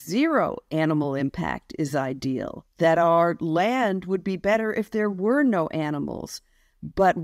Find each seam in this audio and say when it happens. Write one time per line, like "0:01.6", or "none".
0:02.6